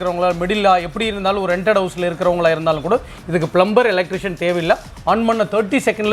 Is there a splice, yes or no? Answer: no